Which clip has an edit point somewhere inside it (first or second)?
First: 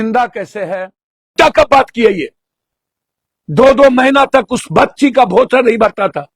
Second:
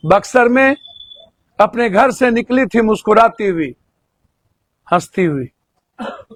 first